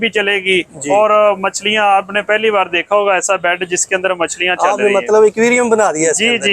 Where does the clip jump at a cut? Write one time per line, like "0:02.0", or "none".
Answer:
none

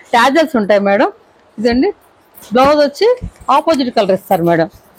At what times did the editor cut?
none

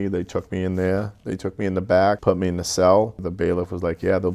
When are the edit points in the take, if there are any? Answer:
0:02.2
0:03.3

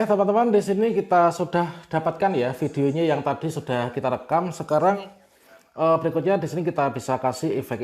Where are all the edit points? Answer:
none

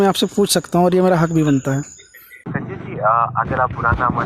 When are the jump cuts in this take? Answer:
0:02.5

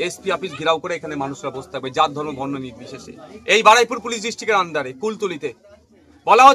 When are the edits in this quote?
none

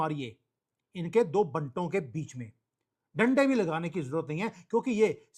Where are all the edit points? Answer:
none

